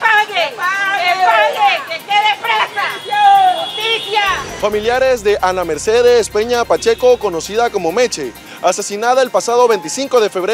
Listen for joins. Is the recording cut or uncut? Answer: uncut